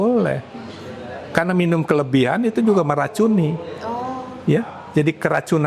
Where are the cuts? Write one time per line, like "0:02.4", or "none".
none